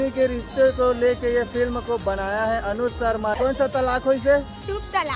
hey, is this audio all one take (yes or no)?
no